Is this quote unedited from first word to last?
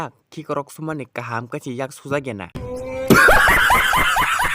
no; 1 cut; at 2.5 s

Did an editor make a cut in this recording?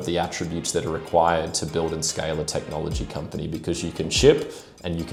no; 0 cuts

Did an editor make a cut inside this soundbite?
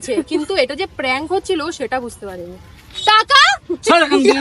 no; 0 cuts

